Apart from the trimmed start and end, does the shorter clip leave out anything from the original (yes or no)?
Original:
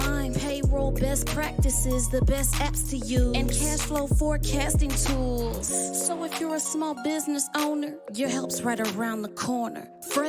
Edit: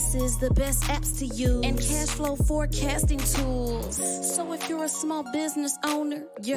no